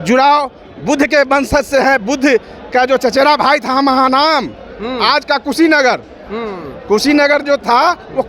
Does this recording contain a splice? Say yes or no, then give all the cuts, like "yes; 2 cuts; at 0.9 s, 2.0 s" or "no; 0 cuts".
no; 0 cuts